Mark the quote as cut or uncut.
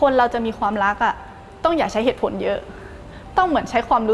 uncut